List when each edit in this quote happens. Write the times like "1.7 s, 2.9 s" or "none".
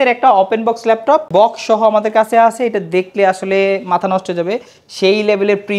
1.3 s